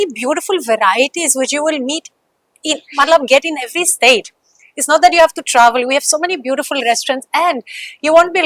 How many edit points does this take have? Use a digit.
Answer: 0